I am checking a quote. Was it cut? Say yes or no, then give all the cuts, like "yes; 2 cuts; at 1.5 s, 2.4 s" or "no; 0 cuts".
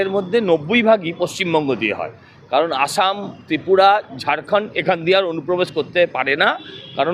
no; 0 cuts